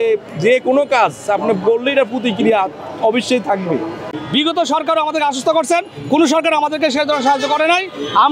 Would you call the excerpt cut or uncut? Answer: cut